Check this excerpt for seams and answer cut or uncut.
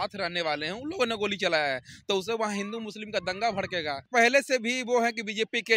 cut